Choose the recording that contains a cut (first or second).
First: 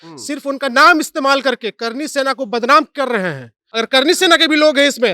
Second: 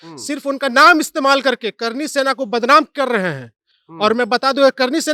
first